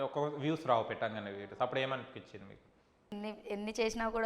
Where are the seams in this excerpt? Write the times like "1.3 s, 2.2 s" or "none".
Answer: 3.1 s